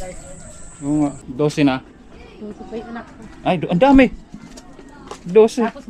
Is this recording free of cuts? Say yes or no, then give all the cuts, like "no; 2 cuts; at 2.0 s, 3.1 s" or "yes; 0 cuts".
no; 1 cut; at 1.2 s